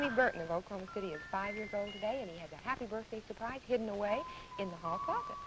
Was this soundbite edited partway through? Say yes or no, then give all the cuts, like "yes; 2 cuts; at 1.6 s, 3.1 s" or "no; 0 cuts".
yes; 1 cut; at 2.4 s